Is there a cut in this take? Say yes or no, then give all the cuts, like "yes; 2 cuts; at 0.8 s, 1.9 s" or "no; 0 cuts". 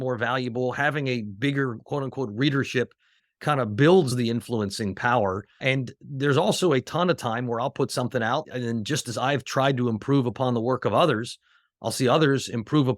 yes; 4 cuts; at 3.2 s, 4.1 s, 5.6 s, 8.5 s